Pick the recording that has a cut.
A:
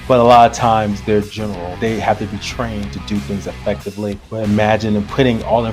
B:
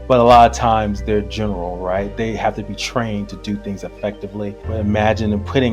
A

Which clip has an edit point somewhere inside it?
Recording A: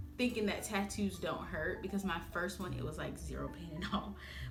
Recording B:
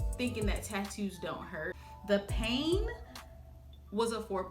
B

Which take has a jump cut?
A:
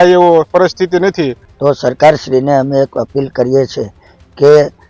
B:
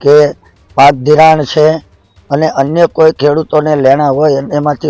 A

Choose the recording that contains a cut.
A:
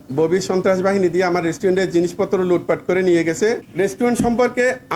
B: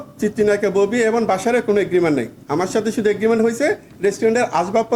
A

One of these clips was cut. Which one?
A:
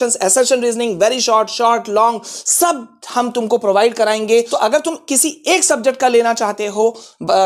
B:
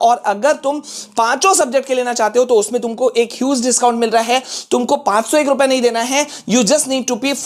A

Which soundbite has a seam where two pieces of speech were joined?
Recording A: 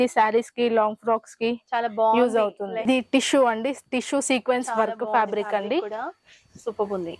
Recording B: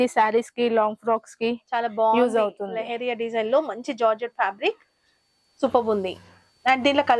A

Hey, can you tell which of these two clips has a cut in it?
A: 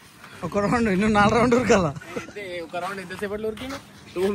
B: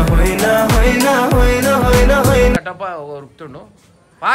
B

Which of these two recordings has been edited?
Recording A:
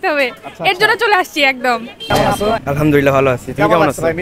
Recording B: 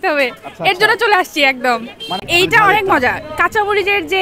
A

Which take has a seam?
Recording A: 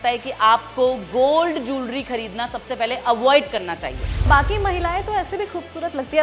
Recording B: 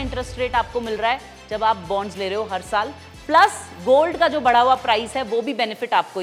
A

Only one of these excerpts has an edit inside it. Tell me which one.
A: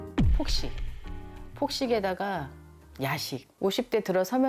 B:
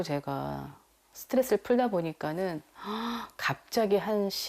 A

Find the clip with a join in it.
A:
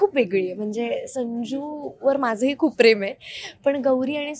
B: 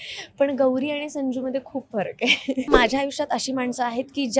B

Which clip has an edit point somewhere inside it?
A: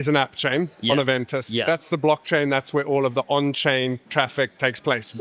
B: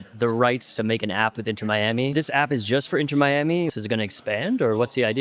B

